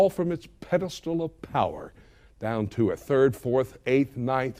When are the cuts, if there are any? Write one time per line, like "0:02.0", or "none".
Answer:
none